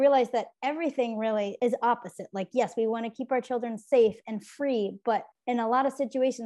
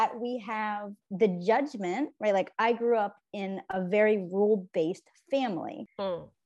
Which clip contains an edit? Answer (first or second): first